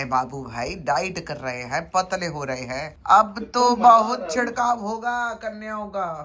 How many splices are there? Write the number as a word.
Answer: one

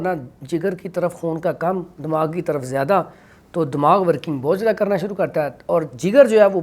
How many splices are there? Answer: zero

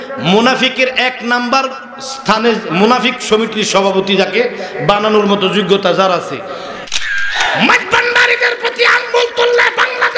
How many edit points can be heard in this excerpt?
one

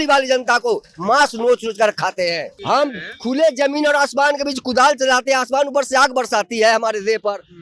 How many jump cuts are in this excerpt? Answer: one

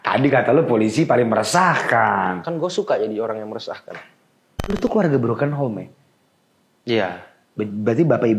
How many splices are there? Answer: one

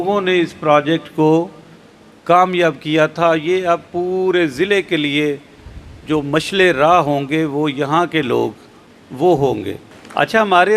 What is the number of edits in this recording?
zero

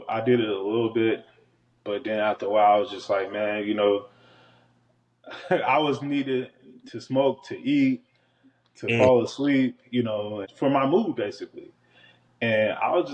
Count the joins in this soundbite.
one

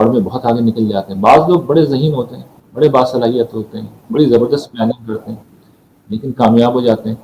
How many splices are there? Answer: zero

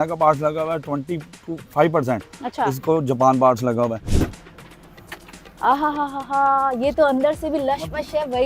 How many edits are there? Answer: one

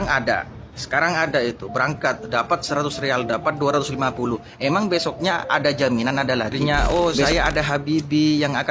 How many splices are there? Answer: one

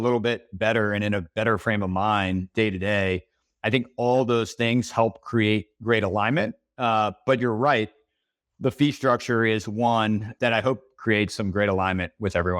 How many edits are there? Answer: one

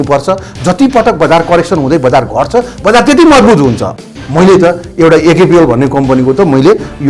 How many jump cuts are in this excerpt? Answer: one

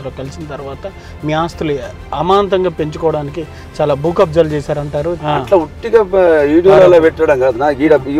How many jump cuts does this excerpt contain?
one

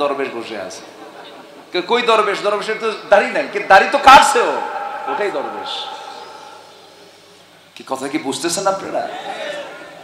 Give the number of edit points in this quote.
zero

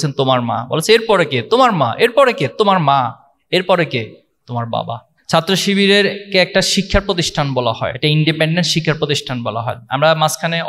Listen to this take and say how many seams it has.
two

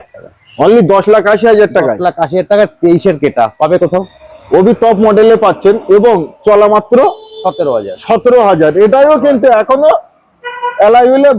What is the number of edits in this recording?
zero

